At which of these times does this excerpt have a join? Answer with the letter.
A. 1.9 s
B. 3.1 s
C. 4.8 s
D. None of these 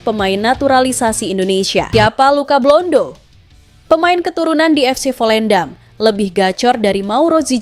A